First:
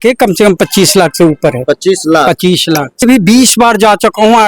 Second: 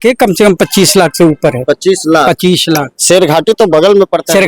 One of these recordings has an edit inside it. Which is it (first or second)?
first